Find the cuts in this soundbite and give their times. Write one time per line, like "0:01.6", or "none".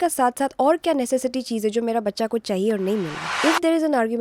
0:03.2